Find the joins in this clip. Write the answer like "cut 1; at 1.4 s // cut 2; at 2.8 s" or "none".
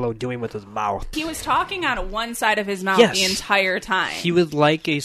cut 1; at 1.1 s